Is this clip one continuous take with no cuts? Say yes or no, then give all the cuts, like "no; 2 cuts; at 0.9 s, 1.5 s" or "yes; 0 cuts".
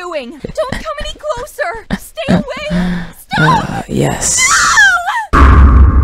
yes; 0 cuts